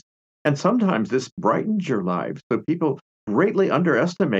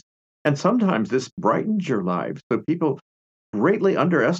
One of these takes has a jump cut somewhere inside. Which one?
first; 1 cut; at 3.1 s

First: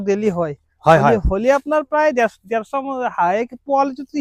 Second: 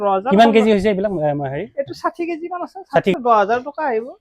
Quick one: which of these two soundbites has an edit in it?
second; 1 cut; at 3.1 s

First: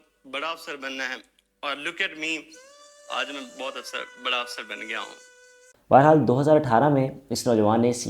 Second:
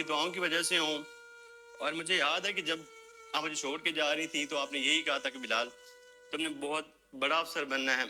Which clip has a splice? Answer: first; 1 cut; at 5.7 s

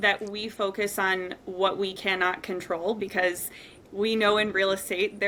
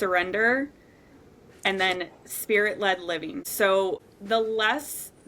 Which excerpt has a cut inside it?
second; 2 cuts; at 3.4 s, 4.0 s

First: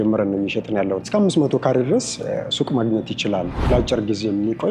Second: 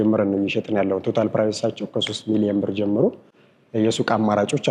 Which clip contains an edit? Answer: first; 2 cuts; at 1.1 s, 3.6 s

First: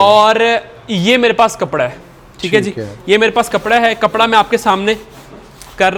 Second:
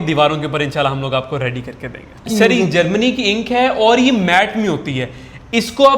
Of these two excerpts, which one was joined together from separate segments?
second; 1 cut; at 2.3 s

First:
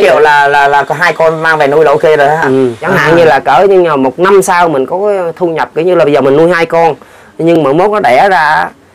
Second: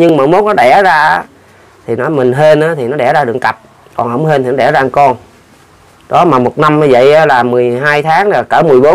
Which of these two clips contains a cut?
first; 1 cut; at 2.8 s

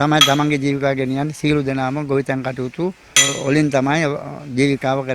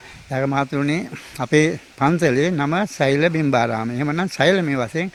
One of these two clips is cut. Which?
first; 1 cut; at 3.1 s

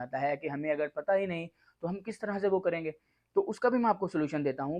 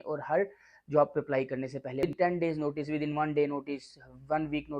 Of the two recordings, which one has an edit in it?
second; 1 cut; at 2.0 s

